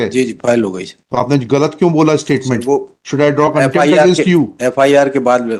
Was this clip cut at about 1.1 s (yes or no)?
no